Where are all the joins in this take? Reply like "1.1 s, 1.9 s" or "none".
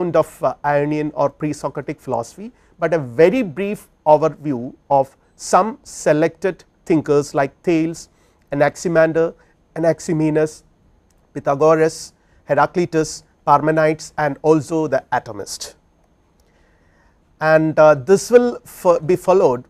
3.1 s